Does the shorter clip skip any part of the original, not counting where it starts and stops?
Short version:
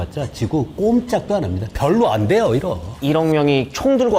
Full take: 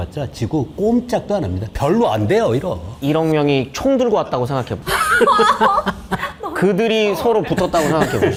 no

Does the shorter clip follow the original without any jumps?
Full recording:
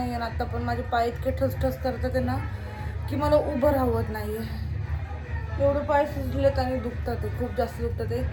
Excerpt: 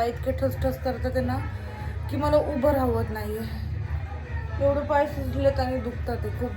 yes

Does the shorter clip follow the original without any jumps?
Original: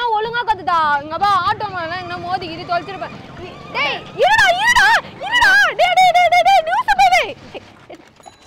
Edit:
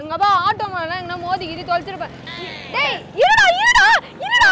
yes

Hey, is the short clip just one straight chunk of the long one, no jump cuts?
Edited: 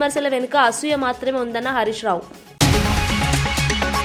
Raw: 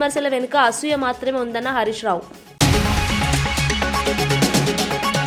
yes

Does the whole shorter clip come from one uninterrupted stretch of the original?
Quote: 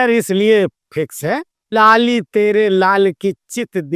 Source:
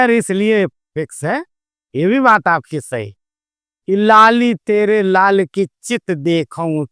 no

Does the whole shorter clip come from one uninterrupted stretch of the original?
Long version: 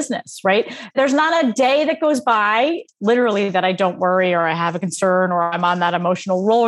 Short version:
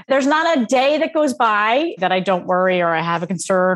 no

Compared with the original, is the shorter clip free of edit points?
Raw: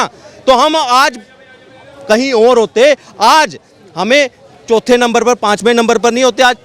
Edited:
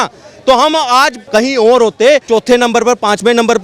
no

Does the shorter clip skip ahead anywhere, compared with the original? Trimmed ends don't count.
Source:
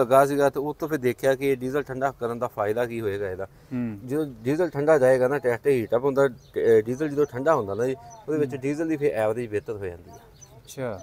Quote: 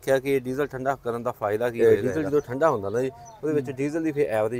yes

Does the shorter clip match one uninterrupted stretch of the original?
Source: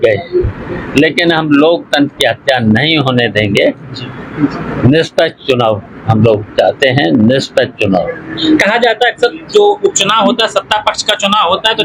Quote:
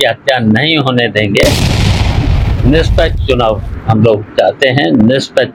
yes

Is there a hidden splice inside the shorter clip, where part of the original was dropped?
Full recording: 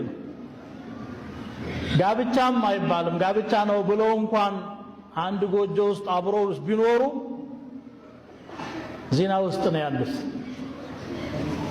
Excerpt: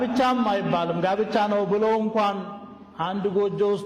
no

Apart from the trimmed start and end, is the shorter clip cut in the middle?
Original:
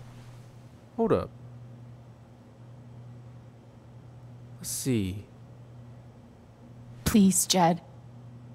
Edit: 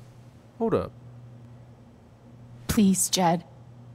yes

